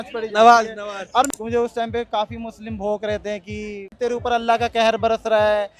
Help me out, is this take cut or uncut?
cut